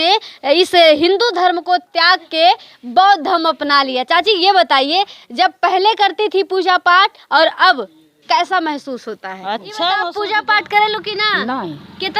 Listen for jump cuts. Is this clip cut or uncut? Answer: cut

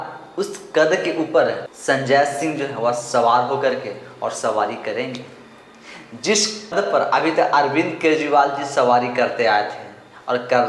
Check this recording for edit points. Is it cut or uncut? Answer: cut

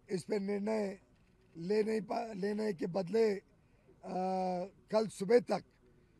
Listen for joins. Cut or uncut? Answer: uncut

